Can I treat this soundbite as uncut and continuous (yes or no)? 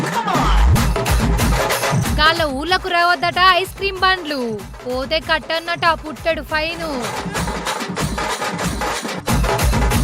yes